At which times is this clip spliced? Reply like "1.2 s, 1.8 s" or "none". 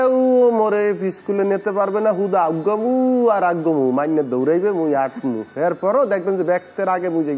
none